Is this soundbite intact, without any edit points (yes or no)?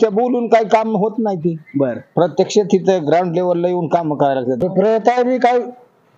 no